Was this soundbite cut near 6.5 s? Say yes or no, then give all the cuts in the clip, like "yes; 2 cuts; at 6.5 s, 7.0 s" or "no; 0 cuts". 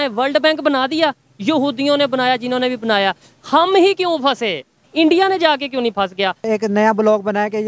yes; 2 cuts; at 4.8 s, 6.5 s